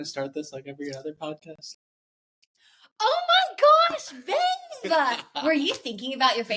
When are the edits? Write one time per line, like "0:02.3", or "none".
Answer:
none